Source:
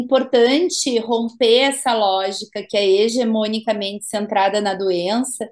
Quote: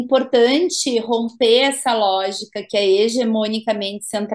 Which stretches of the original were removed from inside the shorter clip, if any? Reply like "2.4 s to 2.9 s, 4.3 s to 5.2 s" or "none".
none